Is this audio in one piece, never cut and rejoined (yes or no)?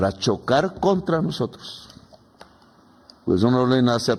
yes